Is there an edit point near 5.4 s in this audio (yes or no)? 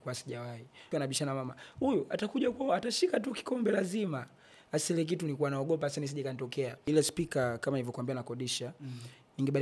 no